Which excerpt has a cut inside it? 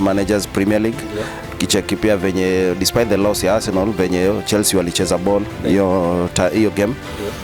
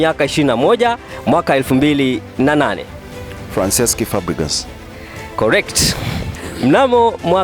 second; 1 cut; at 6.3 s

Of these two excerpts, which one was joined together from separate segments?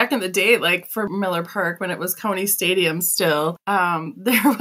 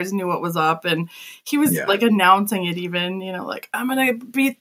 first; 2 cuts; at 1.1 s, 3.6 s

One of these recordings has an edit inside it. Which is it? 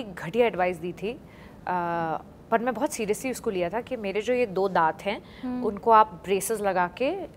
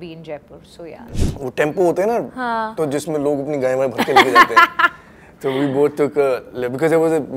second; 1 cut; at 1.1 s

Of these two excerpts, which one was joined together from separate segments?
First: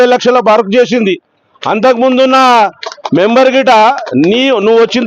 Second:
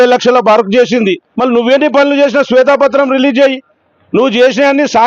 second; 1 cut; at 1.3 s

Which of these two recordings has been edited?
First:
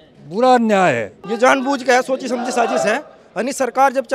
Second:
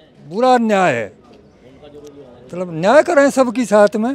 first; 1 cut; at 1.2 s

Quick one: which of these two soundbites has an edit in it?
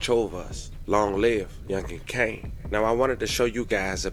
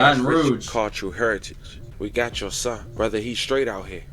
second; 1 cut; at 1.8 s

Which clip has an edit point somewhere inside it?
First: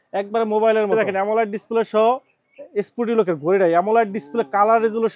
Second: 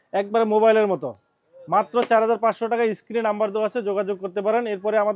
first; 1 cut; at 0.9 s

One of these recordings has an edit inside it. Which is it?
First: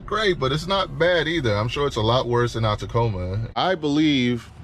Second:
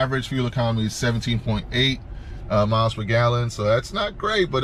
first; 1 cut; at 3.5 s

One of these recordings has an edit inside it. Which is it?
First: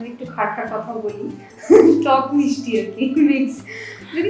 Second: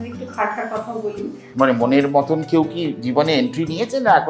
second; 1 cut; at 1.4 s

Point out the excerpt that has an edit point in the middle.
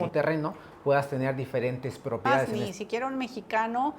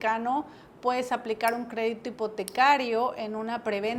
first; 1 cut; at 2.6 s

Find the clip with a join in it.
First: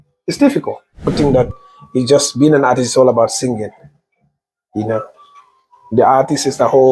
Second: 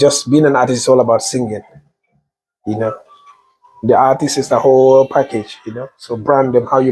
first; 1 cut; at 1.0 s

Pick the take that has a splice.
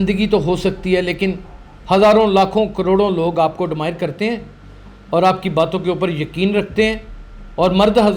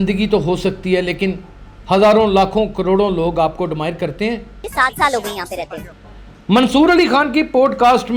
second; 1 cut; at 4.5 s

